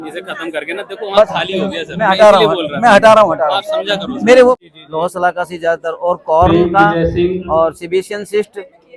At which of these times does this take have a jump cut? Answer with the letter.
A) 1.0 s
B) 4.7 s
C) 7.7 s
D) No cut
B